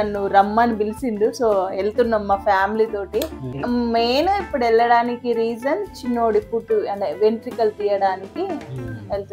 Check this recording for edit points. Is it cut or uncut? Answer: uncut